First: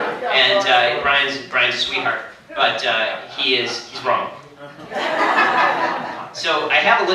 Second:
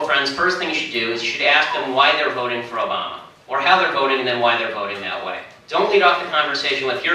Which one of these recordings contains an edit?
first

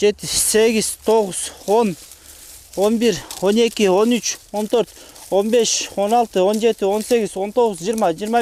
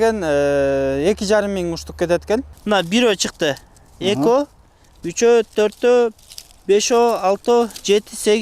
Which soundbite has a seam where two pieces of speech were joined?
second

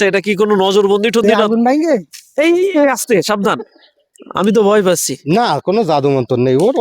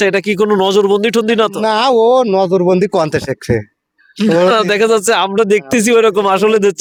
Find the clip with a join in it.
first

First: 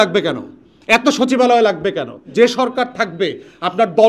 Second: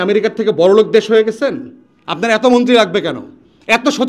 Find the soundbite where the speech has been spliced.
first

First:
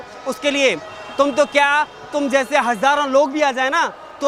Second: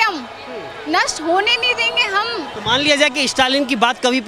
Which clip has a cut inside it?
second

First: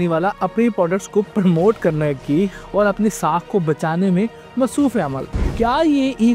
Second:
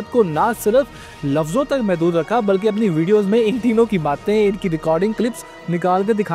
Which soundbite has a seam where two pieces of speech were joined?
first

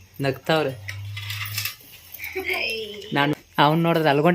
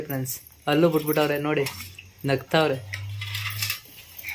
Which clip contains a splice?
first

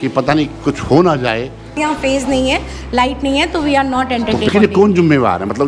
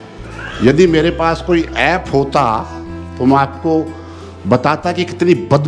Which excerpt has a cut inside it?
first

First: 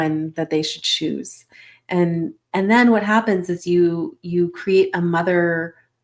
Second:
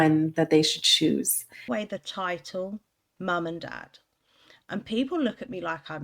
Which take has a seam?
second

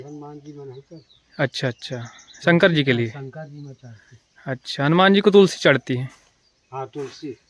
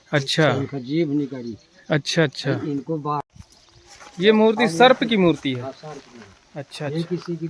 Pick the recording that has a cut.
second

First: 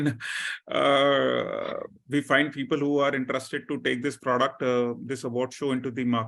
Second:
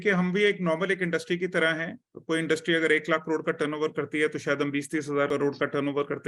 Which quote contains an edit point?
second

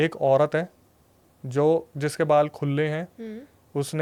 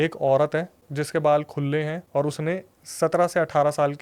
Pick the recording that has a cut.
second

